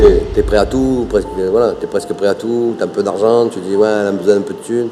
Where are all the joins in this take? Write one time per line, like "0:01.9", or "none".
none

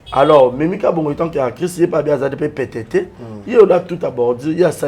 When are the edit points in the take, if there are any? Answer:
none

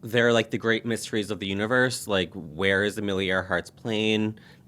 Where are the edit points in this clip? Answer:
none

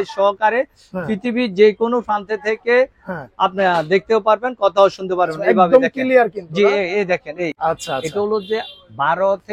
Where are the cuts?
0:07.5

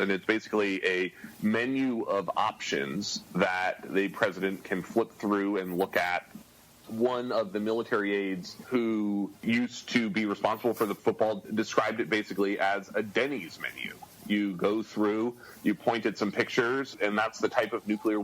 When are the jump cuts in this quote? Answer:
0:08.5
0:09.4
0:11.0

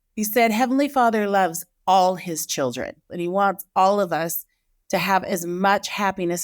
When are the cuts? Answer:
0:03.1

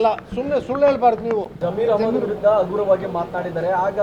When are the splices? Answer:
0:01.6

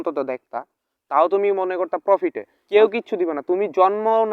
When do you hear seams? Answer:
0:02.5

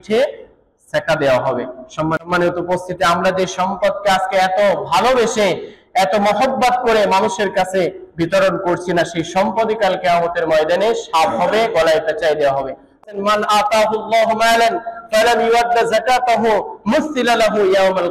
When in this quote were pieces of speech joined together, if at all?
0:02.2
0:13.1

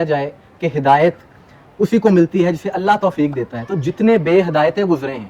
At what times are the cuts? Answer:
none

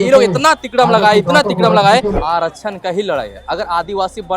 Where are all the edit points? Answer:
0:02.1

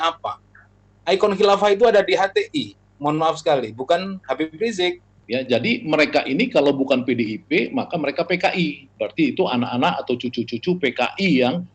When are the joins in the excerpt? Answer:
0:05.1
0:08.9

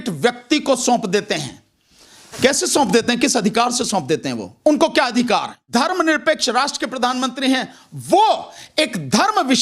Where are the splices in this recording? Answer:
0:05.6

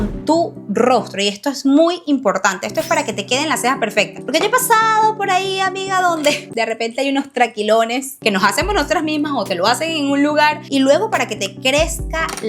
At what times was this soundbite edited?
none

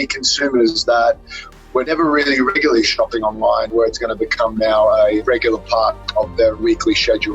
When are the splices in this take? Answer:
0:01.9
0:03.7
0:05.2
0:06.6

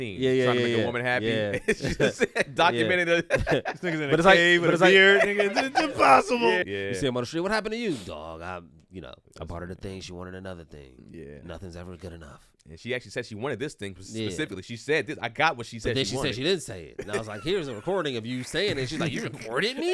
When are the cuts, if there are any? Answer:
none

